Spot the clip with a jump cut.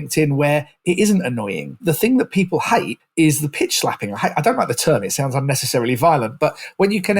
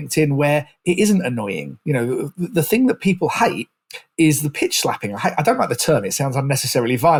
first; 2 cuts; at 1.7 s, 3.0 s

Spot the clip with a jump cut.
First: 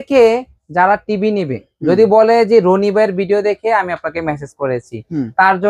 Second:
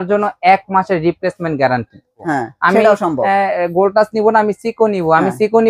second; 1 cut; at 2.2 s

